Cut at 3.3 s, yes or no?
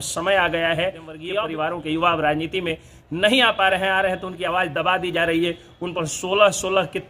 no